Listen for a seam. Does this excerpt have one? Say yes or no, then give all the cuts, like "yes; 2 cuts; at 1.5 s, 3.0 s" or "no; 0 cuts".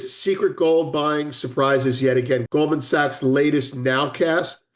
yes; 1 cut; at 2.4 s